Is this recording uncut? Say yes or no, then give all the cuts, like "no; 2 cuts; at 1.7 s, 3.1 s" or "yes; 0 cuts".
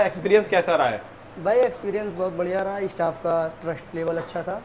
yes; 0 cuts